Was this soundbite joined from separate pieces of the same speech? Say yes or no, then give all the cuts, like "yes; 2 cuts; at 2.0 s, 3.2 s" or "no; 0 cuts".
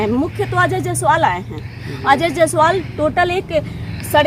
no; 0 cuts